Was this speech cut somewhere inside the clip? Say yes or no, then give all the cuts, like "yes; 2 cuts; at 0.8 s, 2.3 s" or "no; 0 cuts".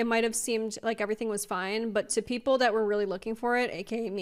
no; 0 cuts